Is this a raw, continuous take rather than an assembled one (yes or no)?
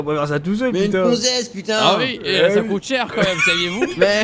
yes